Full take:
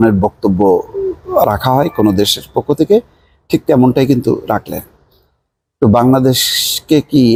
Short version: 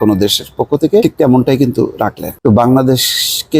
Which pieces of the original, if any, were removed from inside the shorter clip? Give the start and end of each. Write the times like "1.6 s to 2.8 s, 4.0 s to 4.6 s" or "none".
3.0 s to 3.5 s, 4.7 s to 5.6 s